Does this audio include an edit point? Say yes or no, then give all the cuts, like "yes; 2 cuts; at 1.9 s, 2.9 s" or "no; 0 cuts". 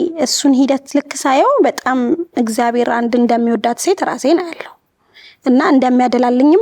no; 0 cuts